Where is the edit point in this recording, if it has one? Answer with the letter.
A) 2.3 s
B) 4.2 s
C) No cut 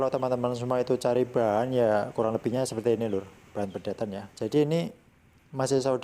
B